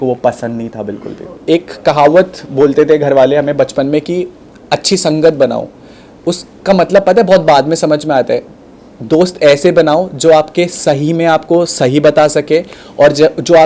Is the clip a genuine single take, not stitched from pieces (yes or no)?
yes